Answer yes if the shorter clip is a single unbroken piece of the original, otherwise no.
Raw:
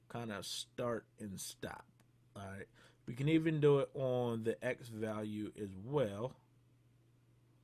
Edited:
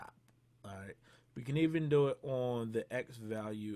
yes